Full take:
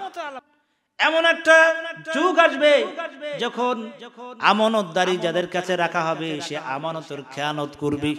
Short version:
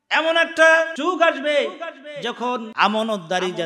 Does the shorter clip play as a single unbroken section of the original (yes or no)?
no